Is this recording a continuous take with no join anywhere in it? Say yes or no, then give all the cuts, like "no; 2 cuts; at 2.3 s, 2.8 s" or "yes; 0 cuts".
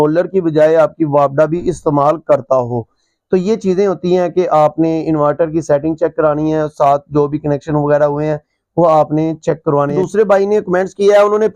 no; 1 cut; at 10.0 s